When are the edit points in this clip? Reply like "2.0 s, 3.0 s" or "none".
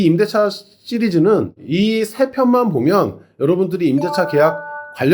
1.6 s